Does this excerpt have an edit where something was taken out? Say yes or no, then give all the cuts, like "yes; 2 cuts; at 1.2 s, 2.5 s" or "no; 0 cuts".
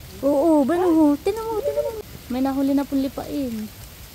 yes; 1 cut; at 2.0 s